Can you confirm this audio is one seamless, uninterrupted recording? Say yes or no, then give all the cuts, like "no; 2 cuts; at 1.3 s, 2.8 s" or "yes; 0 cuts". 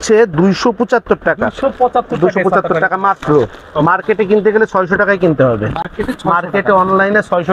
yes; 0 cuts